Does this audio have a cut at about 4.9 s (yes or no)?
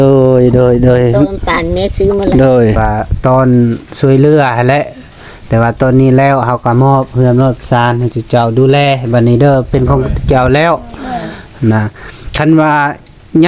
no